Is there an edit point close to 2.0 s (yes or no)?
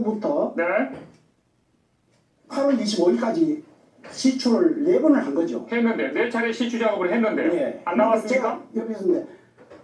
no